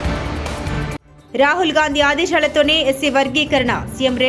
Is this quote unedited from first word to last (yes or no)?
no